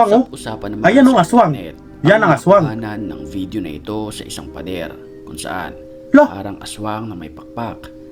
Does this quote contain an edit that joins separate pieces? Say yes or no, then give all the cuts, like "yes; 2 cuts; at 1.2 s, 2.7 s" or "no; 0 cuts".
no; 0 cuts